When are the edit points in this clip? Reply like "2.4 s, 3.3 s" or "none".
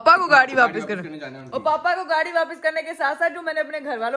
none